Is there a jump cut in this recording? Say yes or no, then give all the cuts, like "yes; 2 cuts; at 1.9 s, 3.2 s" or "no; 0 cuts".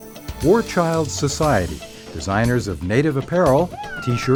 no; 0 cuts